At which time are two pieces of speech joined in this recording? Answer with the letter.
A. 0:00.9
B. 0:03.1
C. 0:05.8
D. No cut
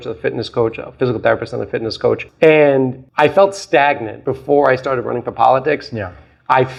D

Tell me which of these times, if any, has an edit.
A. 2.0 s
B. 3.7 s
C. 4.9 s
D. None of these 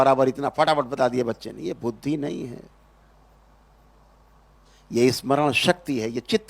D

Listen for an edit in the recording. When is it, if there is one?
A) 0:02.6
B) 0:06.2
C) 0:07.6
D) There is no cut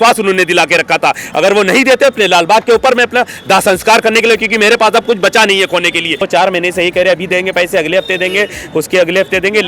B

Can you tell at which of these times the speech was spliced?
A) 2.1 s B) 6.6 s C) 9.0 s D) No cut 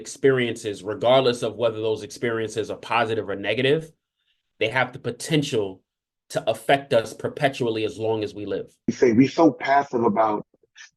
C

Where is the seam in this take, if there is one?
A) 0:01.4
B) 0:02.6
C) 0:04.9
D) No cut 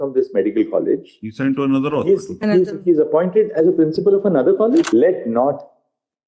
C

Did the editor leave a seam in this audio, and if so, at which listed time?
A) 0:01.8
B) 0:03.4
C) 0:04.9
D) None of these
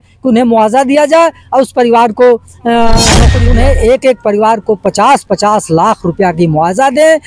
B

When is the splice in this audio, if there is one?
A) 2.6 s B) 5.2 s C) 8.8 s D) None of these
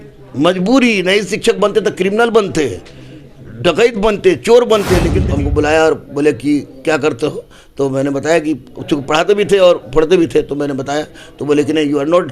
B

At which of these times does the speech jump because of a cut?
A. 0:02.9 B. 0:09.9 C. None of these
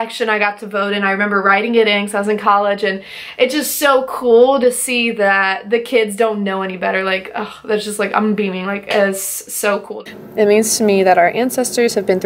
B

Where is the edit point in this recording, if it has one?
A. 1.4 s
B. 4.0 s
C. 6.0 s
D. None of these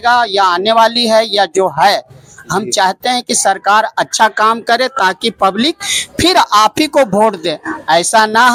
D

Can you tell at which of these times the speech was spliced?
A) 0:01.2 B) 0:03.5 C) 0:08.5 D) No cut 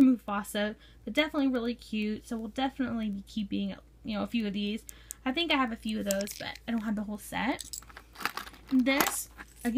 D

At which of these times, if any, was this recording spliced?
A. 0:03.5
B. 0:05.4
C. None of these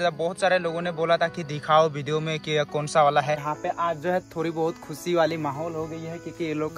A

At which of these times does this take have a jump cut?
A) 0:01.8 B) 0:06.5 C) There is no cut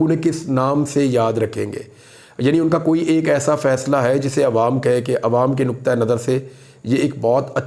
C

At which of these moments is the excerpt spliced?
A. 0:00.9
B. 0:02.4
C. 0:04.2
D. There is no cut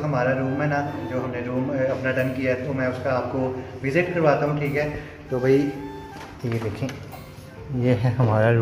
D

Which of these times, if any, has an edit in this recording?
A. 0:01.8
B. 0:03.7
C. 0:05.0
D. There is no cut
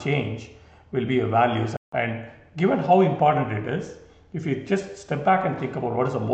A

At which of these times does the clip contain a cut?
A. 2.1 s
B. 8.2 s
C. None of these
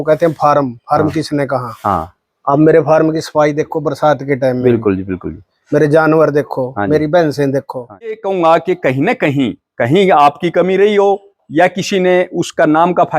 B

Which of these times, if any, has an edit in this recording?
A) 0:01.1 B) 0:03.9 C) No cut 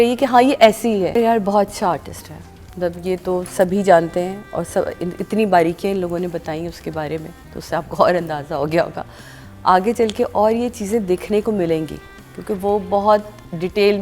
A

